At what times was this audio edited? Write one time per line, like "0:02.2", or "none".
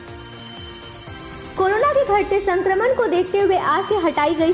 0:01.4